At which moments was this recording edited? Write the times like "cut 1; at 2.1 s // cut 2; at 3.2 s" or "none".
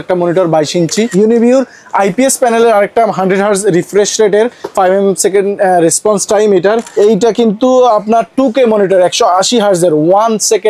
cut 1; at 1.1 s // cut 2; at 6.9 s